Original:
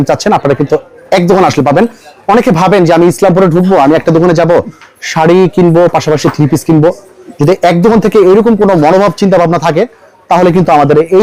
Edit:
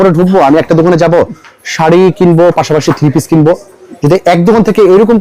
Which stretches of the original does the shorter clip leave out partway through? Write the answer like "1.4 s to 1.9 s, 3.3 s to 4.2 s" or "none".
none